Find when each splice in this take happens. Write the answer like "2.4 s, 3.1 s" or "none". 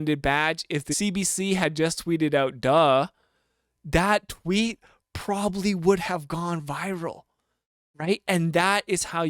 0.9 s